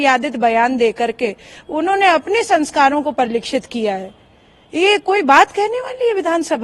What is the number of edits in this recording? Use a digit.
0